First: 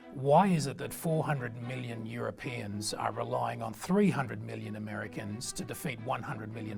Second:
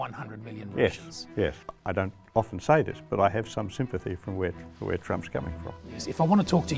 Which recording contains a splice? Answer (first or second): second